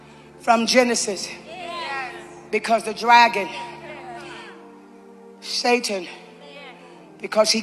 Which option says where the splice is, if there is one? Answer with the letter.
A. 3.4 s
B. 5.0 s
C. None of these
C